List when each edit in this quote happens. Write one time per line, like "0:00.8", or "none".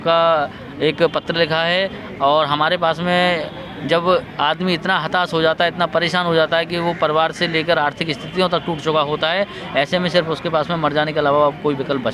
none

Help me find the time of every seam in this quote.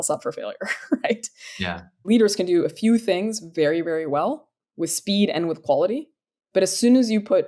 0:02.1

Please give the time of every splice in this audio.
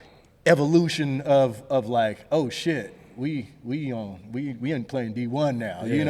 none

